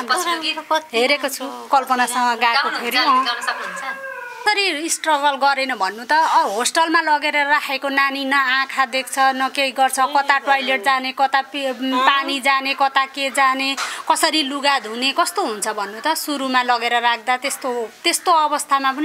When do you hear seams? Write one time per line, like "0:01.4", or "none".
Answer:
0:04.4